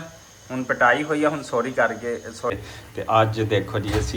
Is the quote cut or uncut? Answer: cut